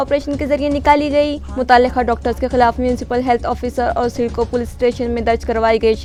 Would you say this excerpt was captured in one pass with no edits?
yes; 0 cuts

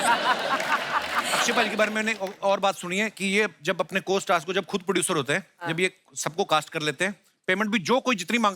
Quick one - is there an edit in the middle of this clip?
yes; 1 cut; at 1.2 s

